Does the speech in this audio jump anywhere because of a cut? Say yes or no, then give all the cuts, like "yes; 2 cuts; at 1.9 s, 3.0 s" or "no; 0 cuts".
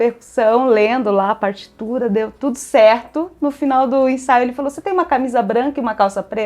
no; 0 cuts